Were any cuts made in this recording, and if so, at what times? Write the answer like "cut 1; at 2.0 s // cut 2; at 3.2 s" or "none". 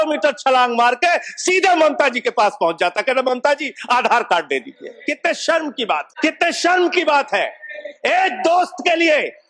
cut 1; at 4.9 s // cut 2; at 6.1 s